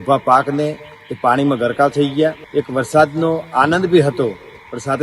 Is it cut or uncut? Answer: cut